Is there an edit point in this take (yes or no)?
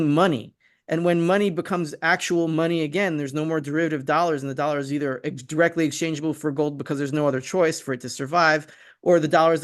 no